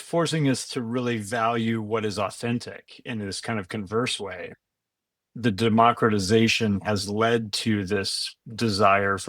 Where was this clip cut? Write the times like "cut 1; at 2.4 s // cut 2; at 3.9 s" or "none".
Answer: cut 1; at 4.5 s